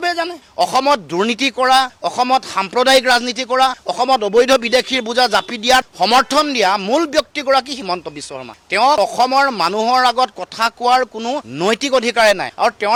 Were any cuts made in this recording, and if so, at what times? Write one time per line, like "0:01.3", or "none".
none